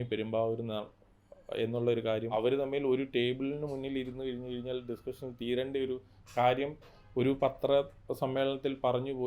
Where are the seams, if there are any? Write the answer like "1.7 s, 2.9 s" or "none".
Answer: 2.3 s